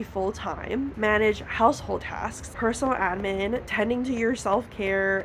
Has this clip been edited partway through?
yes; 3 cuts; at 0.9 s, 2.4 s, 3.7 s

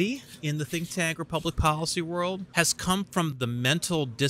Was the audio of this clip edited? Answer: yes; 2 cuts; at 2.5 s, 3.3 s

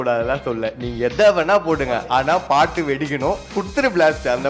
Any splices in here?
yes; 1 cut; at 3.6 s

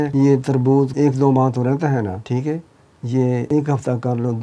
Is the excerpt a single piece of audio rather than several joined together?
no; 3 cuts; at 0.9 s, 2.2 s, 3.5 s

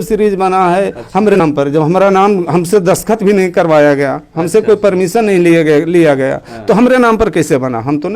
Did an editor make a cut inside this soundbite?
yes; 1 cut; at 1.3 s

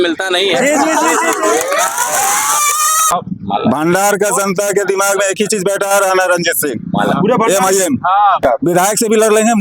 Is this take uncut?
no; 2 cuts; at 3.1 s, 8.4 s

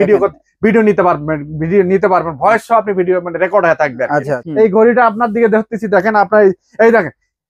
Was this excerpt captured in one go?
no; 1 cut; at 4.4 s

